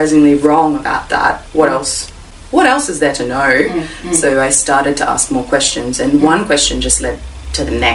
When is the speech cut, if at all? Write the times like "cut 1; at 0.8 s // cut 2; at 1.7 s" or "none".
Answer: none